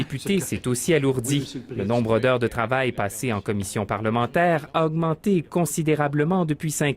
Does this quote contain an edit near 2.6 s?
yes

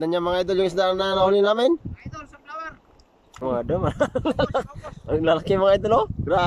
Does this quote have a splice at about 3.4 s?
yes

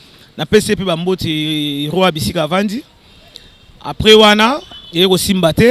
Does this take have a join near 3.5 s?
no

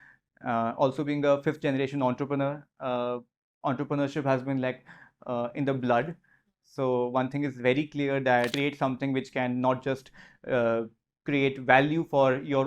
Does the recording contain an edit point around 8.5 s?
yes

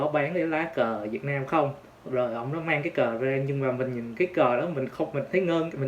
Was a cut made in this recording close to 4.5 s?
no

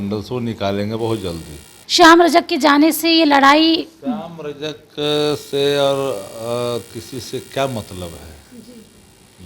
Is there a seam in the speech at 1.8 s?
yes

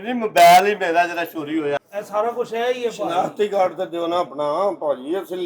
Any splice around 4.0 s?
no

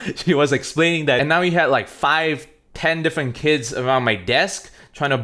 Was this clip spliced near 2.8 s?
no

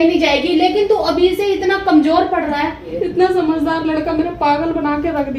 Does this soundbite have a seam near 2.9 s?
yes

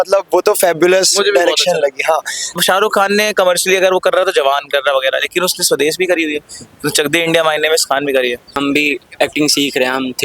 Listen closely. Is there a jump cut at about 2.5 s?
yes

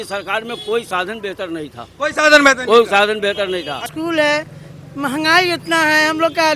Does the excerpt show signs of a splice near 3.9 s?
yes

